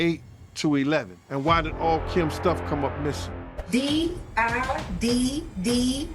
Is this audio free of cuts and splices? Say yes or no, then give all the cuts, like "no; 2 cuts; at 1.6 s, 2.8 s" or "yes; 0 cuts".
no; 2 cuts; at 1.2 s, 3.6 s